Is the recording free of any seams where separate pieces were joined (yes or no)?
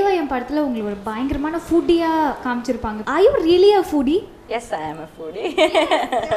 no